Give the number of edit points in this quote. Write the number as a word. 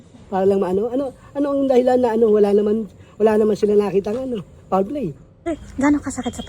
one